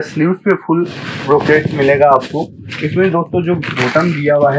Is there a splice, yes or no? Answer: no